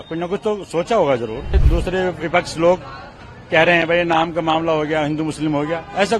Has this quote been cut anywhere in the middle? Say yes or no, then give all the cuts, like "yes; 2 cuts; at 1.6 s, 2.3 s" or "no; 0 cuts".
yes; 1 cut; at 1.6 s